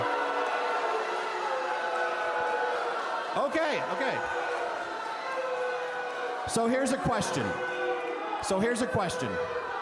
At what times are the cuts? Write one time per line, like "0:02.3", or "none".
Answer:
none